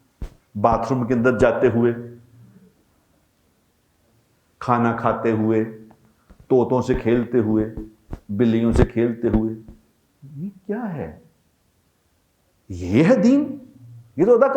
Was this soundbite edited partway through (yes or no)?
no